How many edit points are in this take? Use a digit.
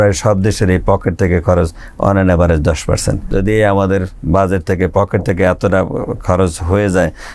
1